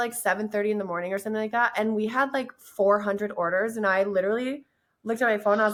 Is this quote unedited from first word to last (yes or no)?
yes